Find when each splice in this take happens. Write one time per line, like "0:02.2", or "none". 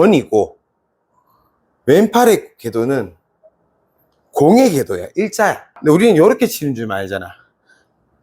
0:05.7